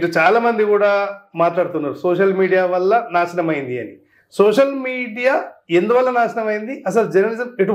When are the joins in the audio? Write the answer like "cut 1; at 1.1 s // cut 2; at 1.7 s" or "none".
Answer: none